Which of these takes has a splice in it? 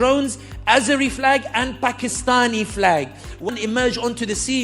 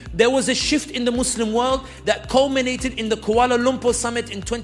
first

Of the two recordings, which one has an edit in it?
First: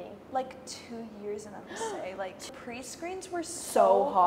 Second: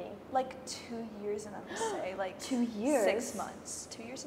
first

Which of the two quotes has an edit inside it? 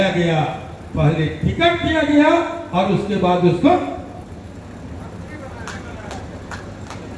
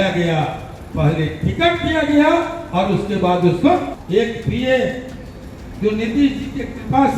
second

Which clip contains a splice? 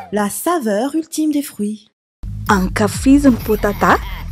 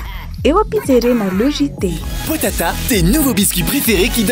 first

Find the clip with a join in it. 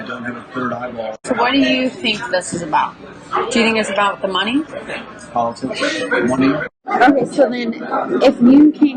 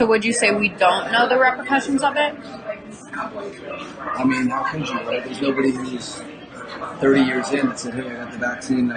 first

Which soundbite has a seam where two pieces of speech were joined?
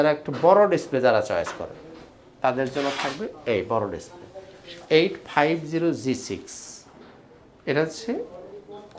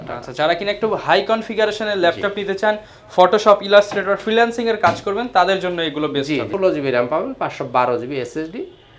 second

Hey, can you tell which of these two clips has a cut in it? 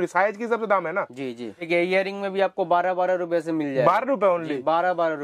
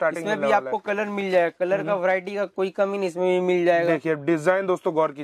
first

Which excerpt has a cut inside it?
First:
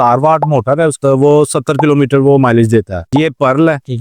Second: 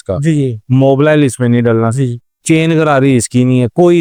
first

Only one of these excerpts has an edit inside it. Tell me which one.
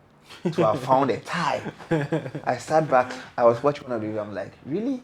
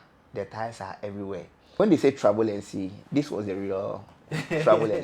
second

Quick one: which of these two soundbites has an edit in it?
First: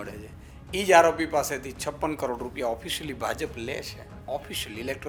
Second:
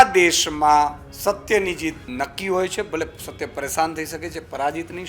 second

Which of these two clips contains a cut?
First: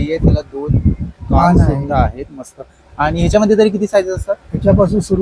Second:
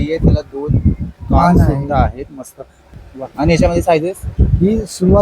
second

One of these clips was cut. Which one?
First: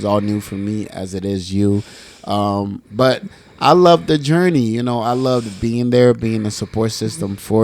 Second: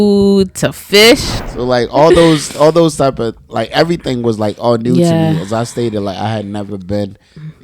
second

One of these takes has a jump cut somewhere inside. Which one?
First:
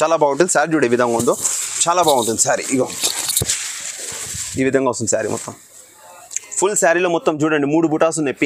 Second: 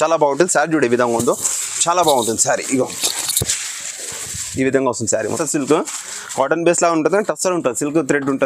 second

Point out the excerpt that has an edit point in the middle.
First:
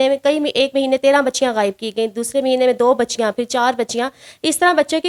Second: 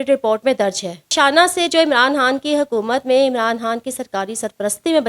second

